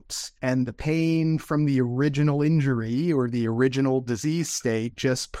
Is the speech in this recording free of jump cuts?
yes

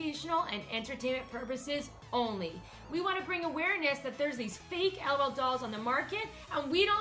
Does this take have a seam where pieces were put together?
yes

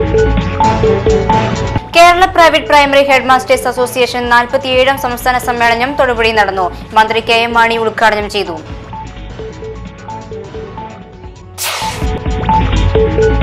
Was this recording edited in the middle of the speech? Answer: no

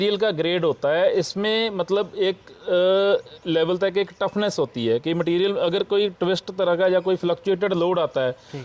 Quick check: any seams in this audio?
no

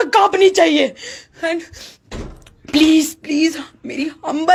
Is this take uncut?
yes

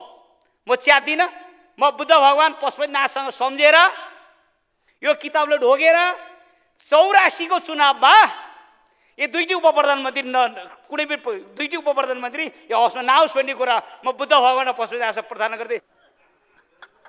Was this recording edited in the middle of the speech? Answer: yes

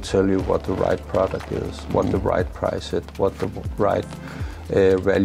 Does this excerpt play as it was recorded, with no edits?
yes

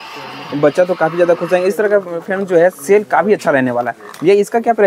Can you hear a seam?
no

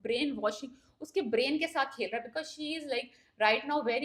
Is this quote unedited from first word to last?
yes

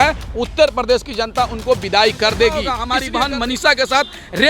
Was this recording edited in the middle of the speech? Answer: yes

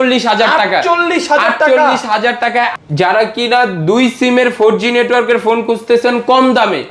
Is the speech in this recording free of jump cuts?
no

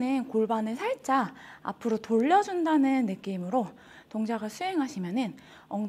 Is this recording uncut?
yes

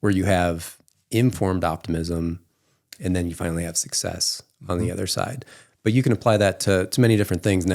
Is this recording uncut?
yes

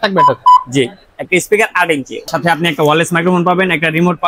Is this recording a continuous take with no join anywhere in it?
no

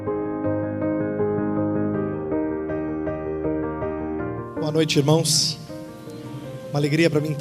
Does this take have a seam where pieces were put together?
no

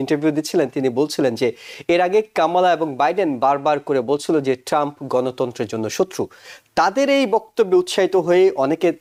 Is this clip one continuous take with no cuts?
yes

